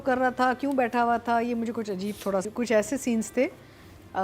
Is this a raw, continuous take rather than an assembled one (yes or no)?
no